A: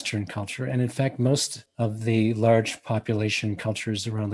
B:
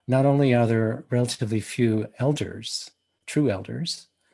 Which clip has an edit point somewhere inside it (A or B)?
A